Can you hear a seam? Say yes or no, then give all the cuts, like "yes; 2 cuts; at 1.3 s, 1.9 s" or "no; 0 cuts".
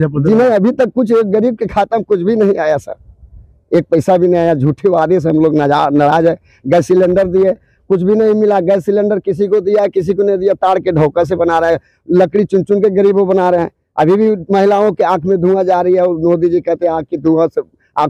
no; 0 cuts